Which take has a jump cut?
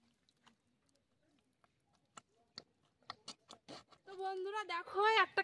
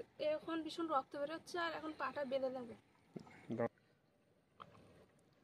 first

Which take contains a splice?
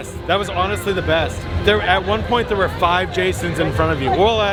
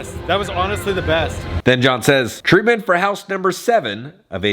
second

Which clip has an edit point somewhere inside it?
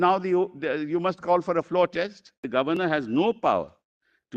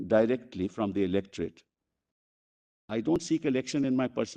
first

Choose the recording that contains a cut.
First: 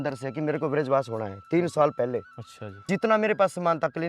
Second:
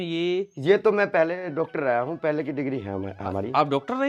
first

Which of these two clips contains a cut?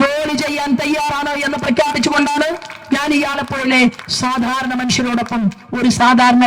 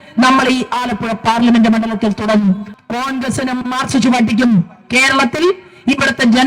second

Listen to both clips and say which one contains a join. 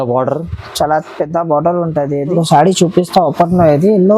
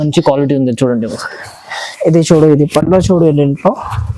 first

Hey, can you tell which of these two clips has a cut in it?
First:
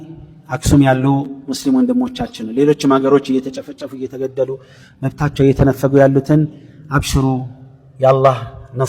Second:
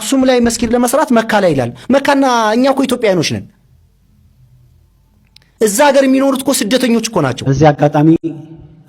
second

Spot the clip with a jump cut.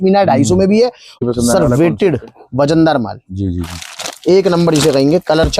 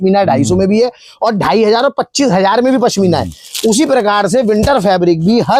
first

